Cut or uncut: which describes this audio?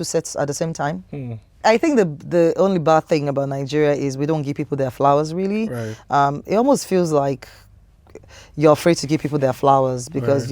cut